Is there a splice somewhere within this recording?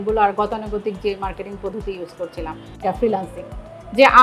yes; 1 cut; at 2.8 s

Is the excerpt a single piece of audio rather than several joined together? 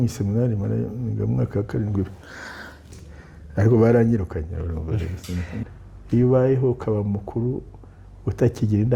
no; 2 cuts; at 3.0 s, 5.6 s

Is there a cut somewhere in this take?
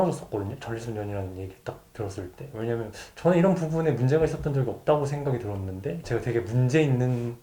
yes; 1 cut; at 6.0 s

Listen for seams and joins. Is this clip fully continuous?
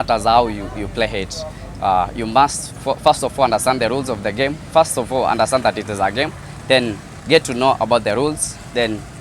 yes; 0 cuts

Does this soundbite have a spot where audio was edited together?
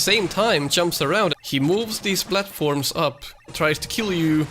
yes; 2 cuts; at 1.4 s, 3.5 s

